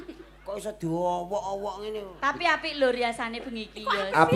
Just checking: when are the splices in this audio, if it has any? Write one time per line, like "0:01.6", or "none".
none